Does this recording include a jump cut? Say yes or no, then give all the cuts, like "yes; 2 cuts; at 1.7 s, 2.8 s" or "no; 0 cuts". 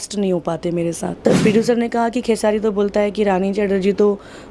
yes; 1 cut; at 1.2 s